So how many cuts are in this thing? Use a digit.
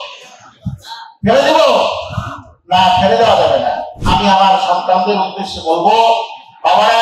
1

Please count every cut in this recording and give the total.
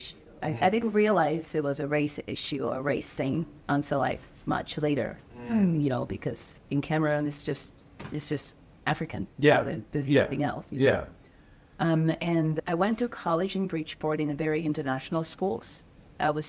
0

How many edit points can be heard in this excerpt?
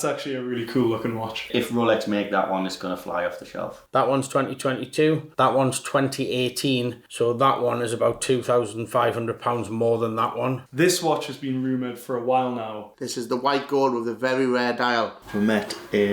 5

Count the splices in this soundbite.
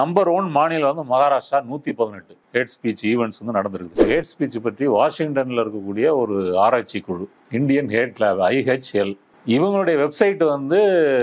2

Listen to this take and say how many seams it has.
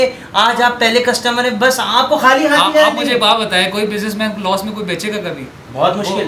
0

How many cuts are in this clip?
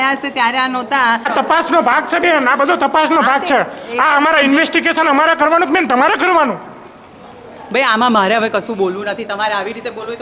1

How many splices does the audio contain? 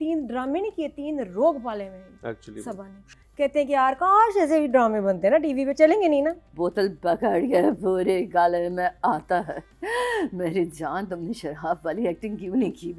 2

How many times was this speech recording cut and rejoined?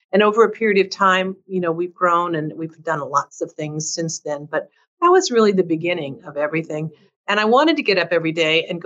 0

